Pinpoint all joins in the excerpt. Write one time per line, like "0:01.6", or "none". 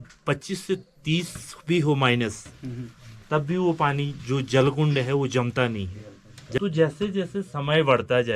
0:06.6